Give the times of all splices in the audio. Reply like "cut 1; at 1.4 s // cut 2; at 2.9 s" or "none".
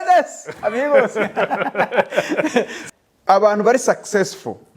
cut 1; at 2.8 s